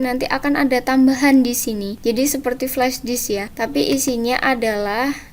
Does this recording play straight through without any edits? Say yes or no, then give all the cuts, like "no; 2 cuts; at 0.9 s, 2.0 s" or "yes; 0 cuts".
no; 2 cuts; at 1.9 s, 3.5 s